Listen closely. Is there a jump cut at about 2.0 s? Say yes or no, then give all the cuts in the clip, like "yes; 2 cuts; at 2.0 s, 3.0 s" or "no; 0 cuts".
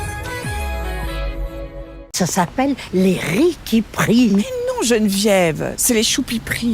yes; 1 cut; at 2.0 s